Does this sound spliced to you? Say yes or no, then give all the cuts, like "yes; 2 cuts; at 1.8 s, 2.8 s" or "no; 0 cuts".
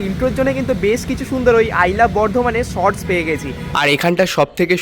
yes; 1 cut; at 3.6 s